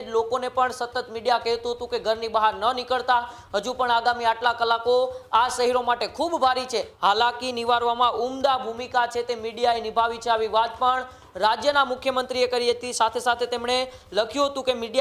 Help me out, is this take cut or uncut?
cut